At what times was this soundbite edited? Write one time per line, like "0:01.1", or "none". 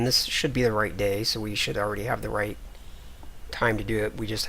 0:01.6